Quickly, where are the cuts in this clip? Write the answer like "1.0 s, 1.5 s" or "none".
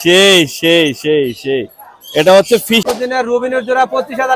2.8 s

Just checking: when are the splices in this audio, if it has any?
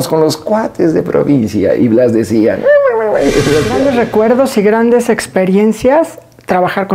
3.7 s

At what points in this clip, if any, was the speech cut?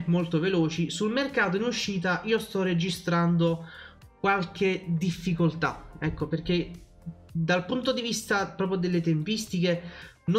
none

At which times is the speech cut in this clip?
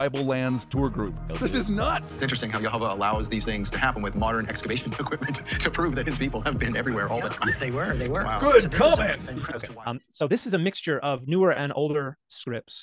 9.6 s

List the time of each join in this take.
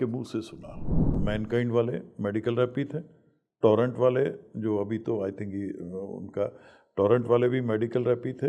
1.2 s

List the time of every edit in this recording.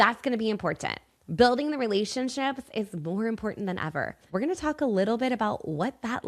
4.2 s

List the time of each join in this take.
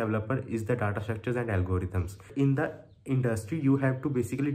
2.3 s

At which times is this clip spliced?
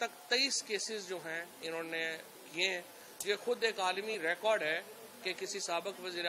none

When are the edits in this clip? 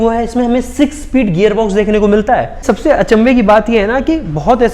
2.6 s

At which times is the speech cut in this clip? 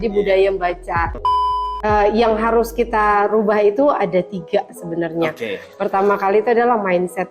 1.4 s

